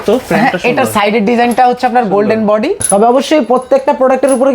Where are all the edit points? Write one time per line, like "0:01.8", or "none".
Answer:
0:02.8